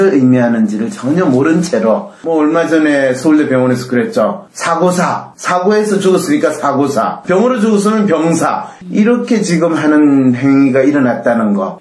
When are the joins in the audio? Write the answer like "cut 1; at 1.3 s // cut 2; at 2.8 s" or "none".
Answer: cut 1; at 2.4 s